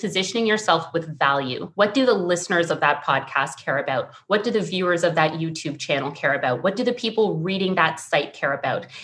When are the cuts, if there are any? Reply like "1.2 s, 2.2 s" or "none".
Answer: 1.6 s

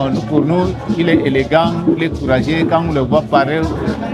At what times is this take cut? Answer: none

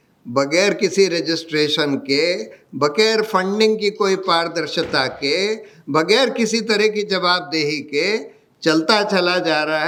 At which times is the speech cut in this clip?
none

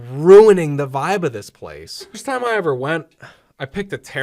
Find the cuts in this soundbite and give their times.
2.2 s

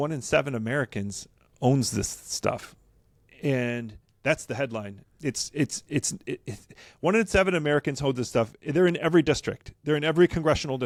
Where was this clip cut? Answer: none

